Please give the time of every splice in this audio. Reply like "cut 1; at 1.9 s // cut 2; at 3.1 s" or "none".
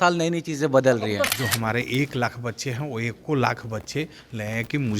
cut 1; at 1.3 s